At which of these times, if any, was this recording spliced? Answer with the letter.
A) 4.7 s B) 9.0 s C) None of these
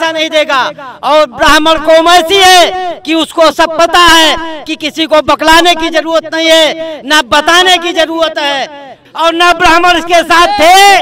B